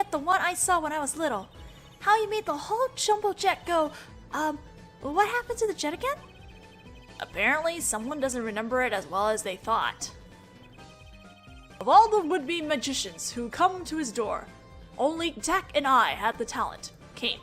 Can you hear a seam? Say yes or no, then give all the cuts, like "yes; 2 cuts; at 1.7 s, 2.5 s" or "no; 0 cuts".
yes; 1 cut; at 13.2 s